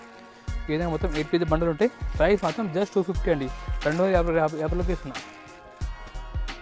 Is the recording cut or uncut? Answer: uncut